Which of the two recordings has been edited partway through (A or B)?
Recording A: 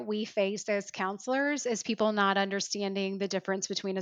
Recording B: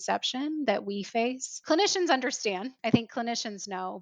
B